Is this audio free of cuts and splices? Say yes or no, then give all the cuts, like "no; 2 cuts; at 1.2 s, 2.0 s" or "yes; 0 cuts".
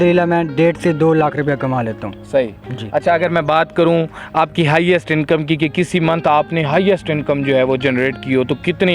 yes; 0 cuts